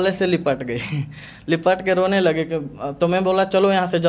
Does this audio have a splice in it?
no; 0 cuts

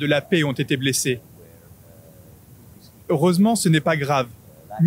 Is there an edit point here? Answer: no; 0 cuts

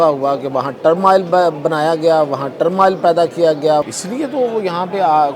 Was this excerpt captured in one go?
no; 1 cut; at 3.9 s

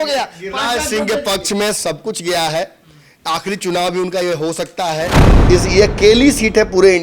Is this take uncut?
no; 1 cut; at 5.3 s

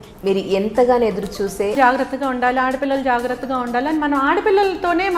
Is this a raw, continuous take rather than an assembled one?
no; 1 cut; at 1.8 s

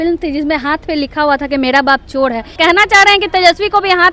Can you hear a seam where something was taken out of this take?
yes; 1 cut; at 2.5 s

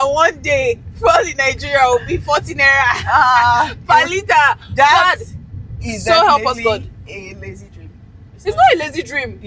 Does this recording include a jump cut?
no; 0 cuts

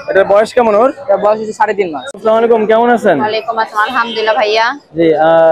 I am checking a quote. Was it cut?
yes; 1 cut; at 2.1 s

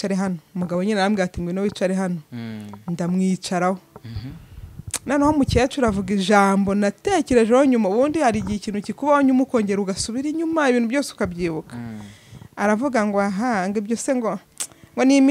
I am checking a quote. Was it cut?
no; 0 cuts

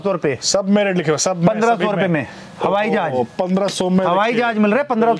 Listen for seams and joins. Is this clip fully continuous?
yes; 0 cuts

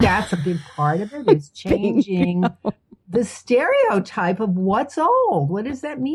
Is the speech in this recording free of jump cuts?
yes; 0 cuts

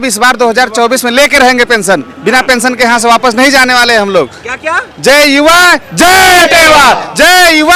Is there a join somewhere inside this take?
no; 0 cuts

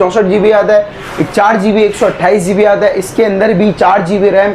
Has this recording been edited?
no; 0 cuts

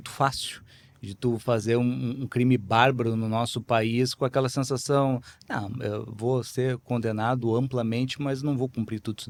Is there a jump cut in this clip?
no; 0 cuts

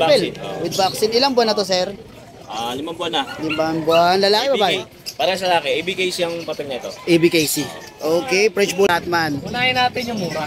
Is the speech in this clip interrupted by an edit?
yes; 1 cut; at 8.9 s

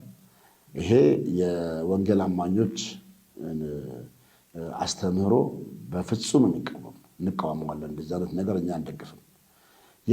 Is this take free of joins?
yes; 0 cuts

